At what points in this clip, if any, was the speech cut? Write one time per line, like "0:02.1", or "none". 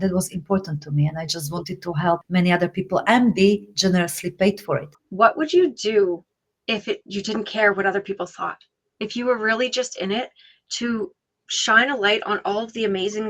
0:02.2
0:05.0